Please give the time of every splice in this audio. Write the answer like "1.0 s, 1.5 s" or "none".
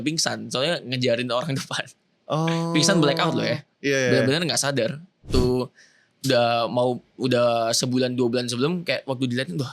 5.3 s